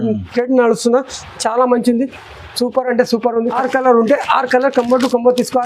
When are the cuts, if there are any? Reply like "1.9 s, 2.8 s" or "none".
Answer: 3.6 s